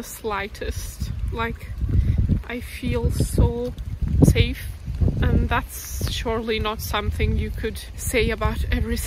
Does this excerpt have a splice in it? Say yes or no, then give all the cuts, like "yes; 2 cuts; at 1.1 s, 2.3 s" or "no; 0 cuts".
yes; 3 cuts; at 4.0 s, 4.9 s, 7.9 s